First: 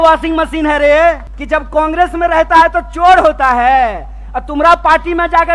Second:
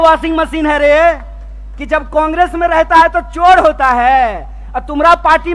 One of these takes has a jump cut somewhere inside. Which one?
first; 1 cut; at 1.3 s

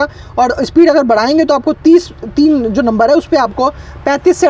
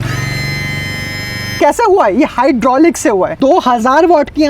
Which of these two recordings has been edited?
second; 2 cuts; at 1.5 s, 3.3 s

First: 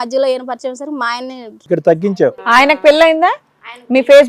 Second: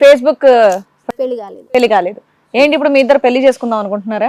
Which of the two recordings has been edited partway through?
first; 1 cut; at 1.5 s

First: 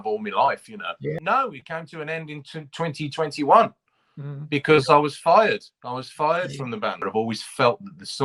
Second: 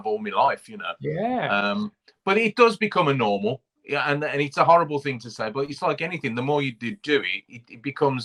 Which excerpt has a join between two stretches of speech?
first; 2 cuts; at 1.2 s, 7.0 s

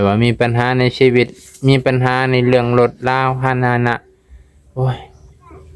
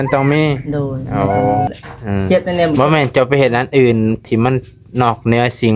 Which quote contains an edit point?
second; 1 cut; at 1.7 s

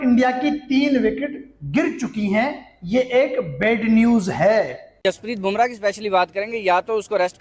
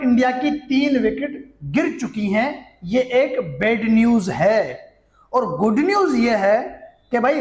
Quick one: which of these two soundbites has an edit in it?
first; 1 cut; at 4.8 s

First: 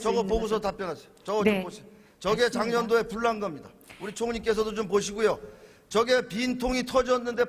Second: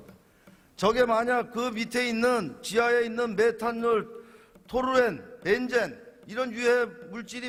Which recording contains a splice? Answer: first; 1 cut; at 5.5 s

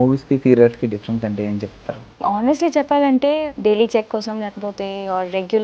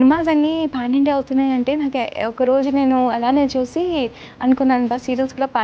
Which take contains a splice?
first; 2 cuts; at 2.0 s, 3.4 s

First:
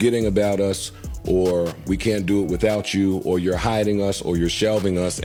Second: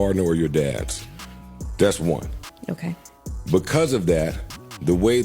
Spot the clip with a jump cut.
second; 1 cut; at 3.1 s

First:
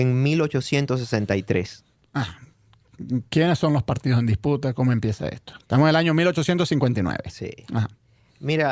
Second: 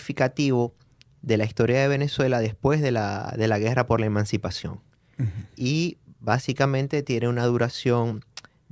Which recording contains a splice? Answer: second; 1 cut; at 7.1 s

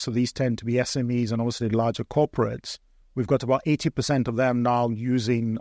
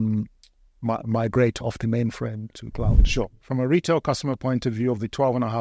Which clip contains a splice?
second; 1 cut; at 3.0 s

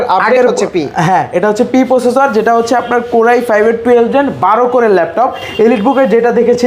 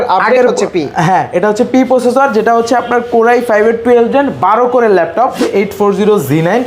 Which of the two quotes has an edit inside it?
second; 1 cut; at 5.4 s

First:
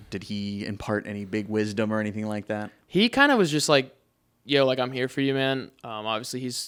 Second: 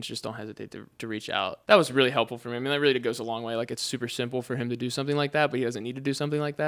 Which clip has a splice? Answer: second; 1 cut; at 1.6 s

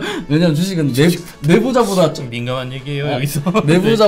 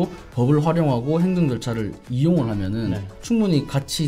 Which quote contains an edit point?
second; 1 cut; at 3.1 s

